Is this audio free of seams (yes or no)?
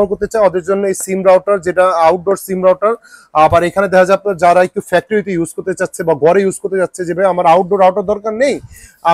yes